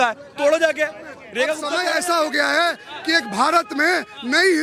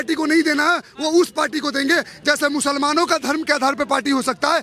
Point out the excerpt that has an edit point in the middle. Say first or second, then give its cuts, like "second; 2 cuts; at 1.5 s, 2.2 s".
first; 1 cut; at 1.7 s